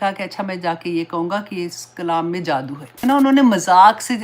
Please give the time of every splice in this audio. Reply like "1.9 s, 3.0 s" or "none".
3.0 s